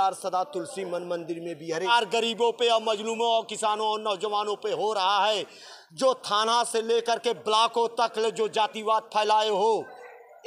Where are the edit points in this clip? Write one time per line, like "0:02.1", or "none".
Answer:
0:01.9